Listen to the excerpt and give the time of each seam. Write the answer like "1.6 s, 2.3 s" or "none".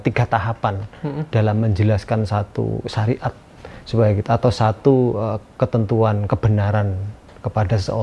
none